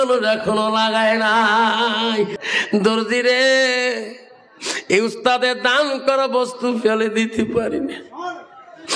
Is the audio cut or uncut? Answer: cut